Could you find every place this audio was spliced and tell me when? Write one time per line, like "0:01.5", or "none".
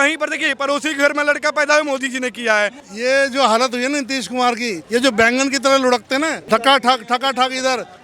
0:02.8
0:04.8
0:06.4